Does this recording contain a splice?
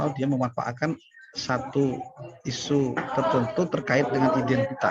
no; 0 cuts

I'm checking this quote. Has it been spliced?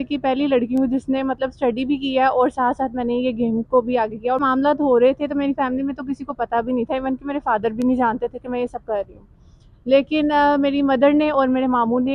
yes; 1 cut; at 4.4 s

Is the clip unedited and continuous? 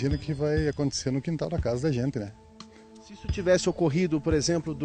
yes; 0 cuts

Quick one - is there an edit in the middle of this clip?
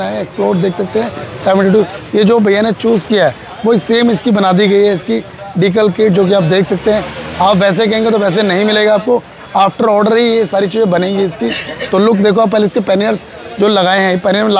no; 0 cuts

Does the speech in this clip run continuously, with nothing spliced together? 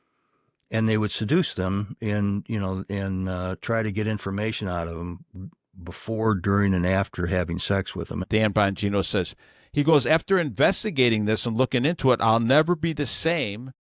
no; 1 cut; at 8.2 s

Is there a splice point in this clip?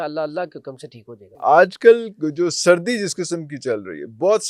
yes; 1 cut; at 1.3 s

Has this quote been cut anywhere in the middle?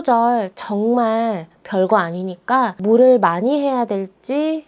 yes; 1 cut; at 2.8 s

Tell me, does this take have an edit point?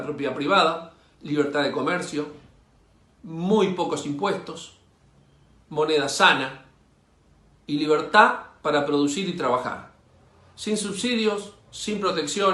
no; 0 cuts

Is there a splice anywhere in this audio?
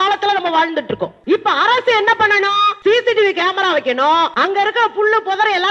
yes; 3 cuts; at 1.1 s, 2.7 s, 4.3 s

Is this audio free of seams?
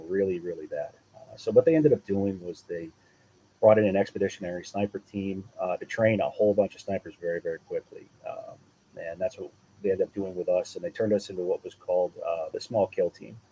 no; 1 cut; at 12.6 s

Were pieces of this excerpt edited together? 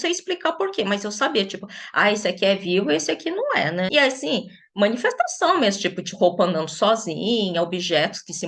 yes; 1 cut; at 3.9 s

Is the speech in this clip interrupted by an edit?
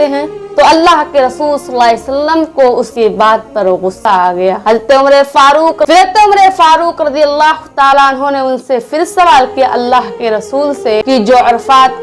yes; 2 cuts; at 5.9 s, 11.0 s

